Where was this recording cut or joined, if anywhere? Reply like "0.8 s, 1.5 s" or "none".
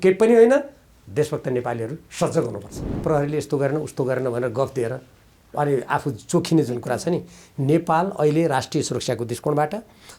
3.0 s